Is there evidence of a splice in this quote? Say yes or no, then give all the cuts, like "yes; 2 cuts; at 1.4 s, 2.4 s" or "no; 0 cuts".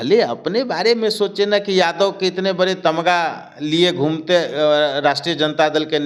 no; 0 cuts